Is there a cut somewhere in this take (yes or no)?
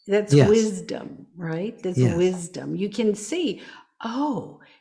no